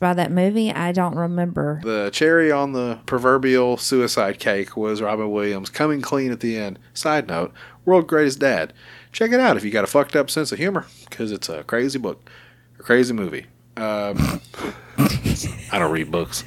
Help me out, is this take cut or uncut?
cut